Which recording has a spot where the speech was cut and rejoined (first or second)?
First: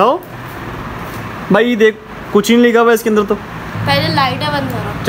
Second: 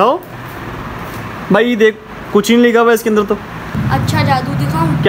first